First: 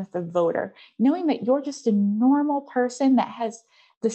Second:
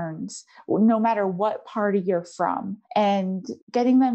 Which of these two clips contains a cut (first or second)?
second